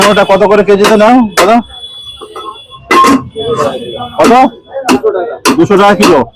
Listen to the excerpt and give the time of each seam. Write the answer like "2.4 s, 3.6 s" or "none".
none

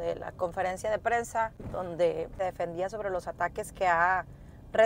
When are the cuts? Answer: 1.6 s, 2.4 s

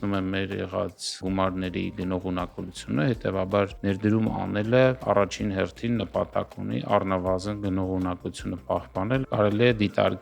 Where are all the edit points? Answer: 1.2 s, 3.8 s, 9.2 s

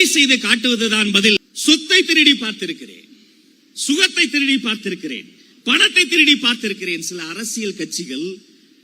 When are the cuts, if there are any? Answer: 1.4 s

